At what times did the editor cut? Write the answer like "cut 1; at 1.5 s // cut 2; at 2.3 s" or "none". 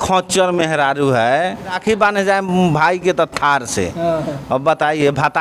cut 1; at 1.8 s